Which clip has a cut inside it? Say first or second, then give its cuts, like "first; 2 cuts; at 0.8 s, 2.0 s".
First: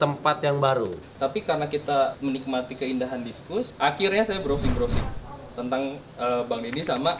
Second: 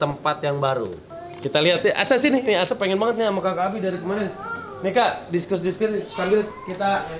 first; 3 cuts; at 1.0 s, 2.2 s, 3.7 s